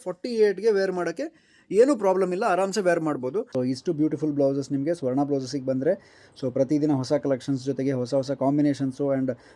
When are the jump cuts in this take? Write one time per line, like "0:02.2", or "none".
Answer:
0:03.5

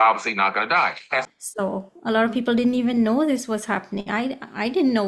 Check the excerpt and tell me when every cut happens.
0:01.2

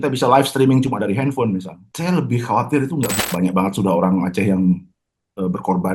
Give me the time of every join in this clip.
0:01.8
0:03.1

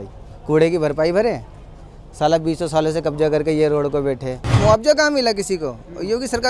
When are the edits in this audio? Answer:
0:04.6

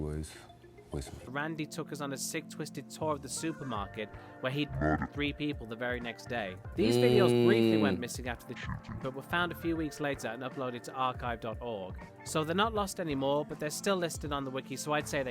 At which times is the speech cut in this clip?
0:01.3

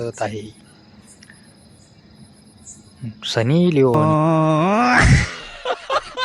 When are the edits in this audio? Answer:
0:03.9

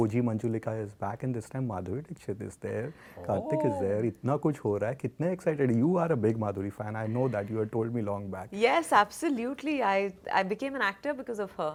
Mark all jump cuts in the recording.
none

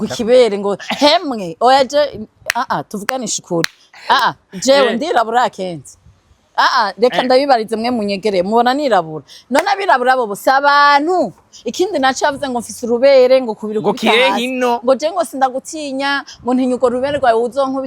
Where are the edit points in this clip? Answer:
none

